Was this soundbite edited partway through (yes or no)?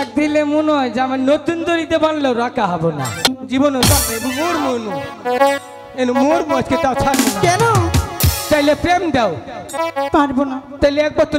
yes